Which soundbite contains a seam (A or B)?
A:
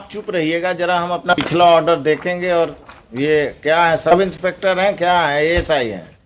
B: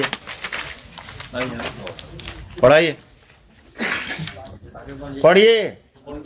A